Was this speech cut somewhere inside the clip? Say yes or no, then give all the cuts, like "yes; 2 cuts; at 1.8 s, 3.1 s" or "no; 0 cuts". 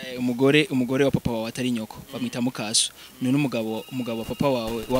no; 0 cuts